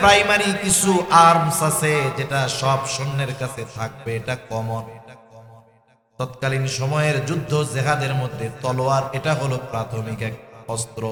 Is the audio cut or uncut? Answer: uncut